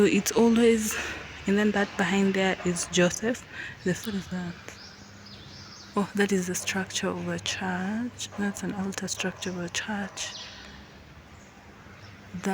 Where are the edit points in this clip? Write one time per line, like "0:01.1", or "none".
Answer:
0:04.0